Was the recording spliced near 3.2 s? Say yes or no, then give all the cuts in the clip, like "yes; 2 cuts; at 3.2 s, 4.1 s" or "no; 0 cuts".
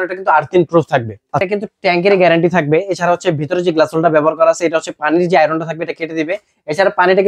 no; 1 cut; at 1.4 s